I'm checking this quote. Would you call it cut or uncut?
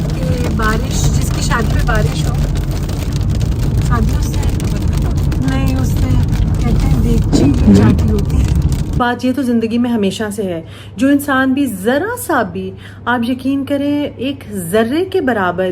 cut